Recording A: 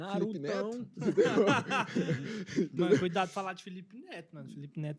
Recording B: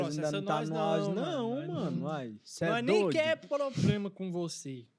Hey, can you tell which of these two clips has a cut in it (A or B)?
A